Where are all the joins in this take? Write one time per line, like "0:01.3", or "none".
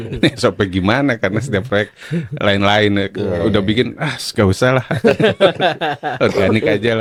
none